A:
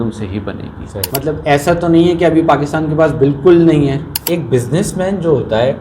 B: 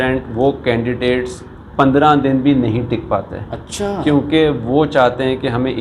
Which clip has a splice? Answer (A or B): A